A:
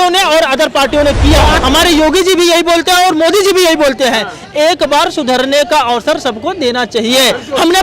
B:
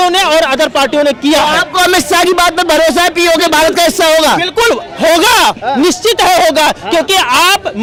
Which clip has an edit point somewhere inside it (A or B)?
A